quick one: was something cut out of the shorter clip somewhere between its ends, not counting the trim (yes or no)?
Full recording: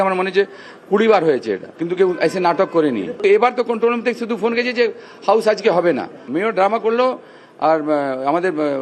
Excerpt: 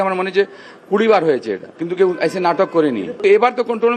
no